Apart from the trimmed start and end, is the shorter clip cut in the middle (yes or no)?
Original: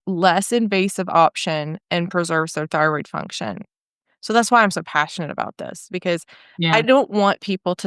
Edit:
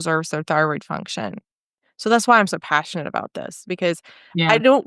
no